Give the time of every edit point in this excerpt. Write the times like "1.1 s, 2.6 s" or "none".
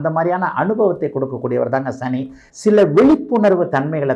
2.5 s